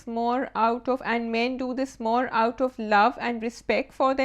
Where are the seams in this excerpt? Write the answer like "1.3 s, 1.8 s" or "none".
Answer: none